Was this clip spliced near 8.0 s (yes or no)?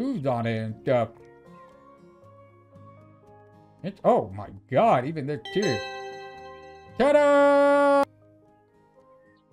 yes